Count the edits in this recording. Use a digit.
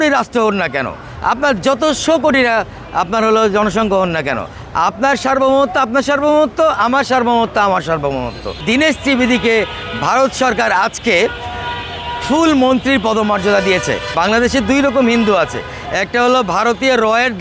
2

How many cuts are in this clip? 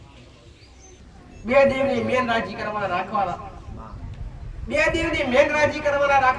1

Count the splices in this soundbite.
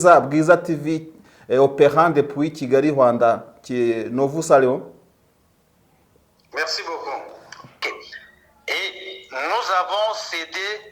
1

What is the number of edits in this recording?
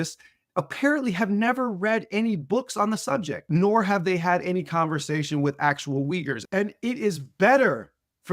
2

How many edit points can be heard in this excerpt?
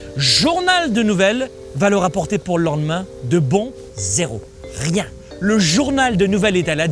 3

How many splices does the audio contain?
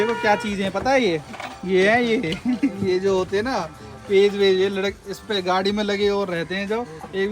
0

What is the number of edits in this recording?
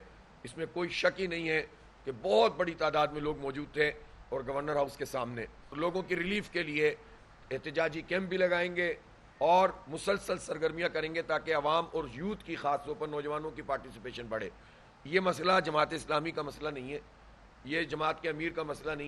1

